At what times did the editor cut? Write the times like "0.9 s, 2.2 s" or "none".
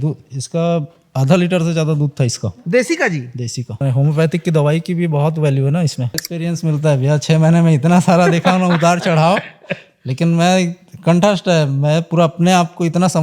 3.8 s, 6.2 s